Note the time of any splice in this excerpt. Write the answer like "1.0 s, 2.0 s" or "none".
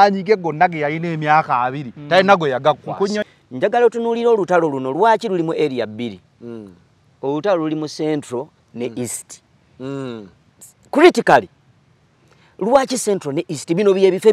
3.2 s